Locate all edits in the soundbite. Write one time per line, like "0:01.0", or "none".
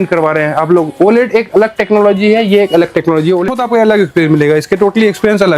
0:03.4